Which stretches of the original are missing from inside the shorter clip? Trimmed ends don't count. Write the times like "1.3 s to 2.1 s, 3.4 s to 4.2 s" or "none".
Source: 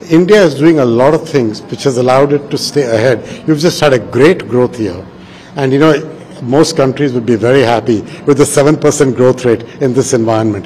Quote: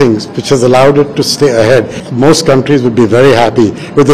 3.3 s to 6.3 s